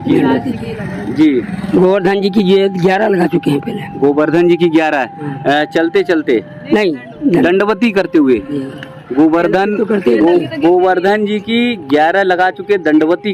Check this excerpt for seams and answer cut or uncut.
uncut